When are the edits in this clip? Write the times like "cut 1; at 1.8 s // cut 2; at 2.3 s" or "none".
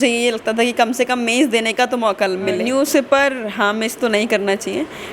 cut 1; at 2.6 s